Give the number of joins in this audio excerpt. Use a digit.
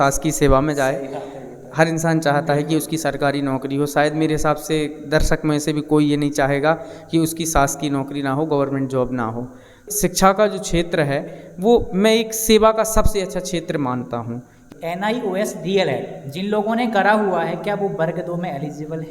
2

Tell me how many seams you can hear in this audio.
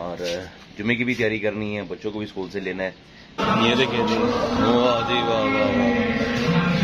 1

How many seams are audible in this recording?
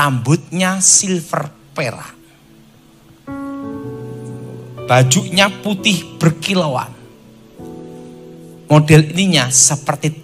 0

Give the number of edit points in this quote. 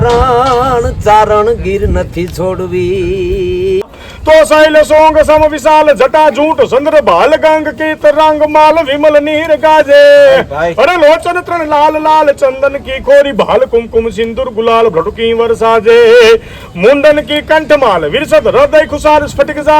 1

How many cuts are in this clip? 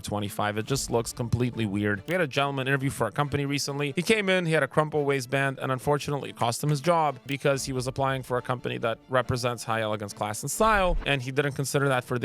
4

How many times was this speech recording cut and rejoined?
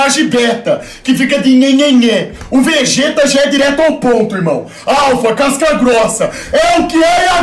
0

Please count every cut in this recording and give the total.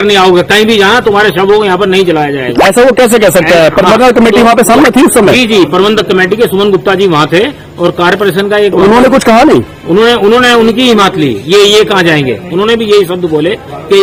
0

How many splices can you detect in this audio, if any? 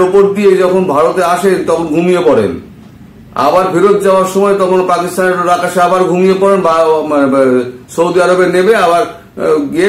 0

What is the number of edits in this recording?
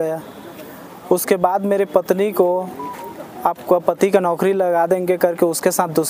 0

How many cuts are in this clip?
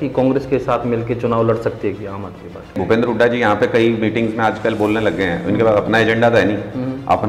1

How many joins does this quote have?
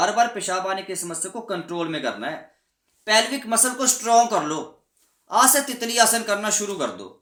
0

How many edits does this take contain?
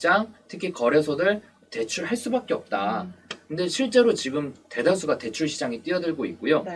0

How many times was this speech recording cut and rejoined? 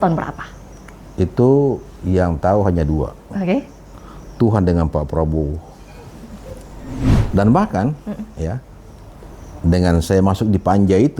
1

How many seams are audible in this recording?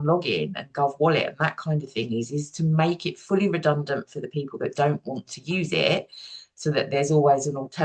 0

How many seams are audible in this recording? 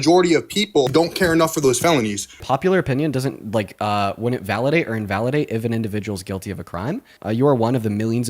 3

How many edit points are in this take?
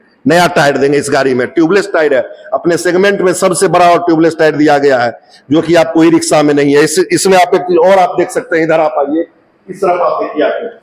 0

